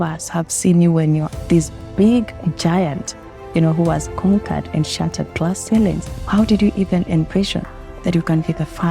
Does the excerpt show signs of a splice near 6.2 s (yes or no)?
yes